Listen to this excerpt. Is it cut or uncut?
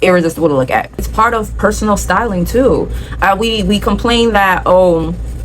cut